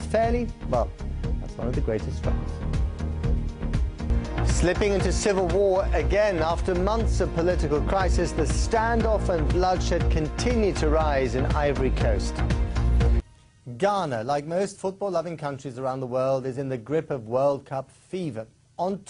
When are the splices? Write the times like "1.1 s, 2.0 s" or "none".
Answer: 4.3 s